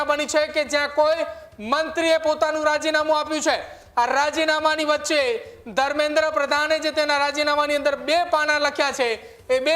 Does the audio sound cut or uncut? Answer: uncut